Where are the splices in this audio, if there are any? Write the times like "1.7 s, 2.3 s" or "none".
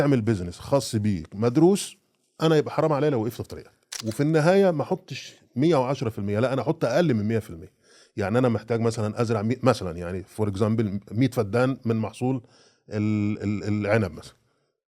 4.0 s